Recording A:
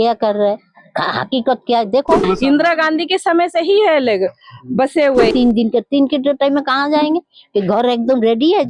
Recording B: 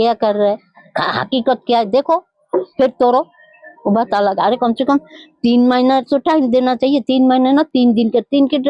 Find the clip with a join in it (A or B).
A